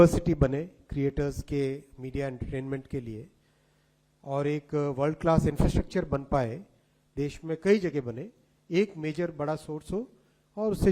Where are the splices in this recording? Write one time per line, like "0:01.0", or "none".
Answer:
none